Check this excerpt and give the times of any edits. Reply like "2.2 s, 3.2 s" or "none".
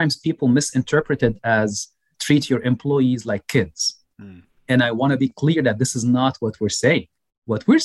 2.1 s